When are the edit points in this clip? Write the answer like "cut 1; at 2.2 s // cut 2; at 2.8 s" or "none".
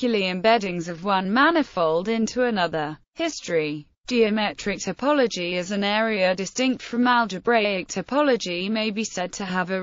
cut 1; at 6.6 s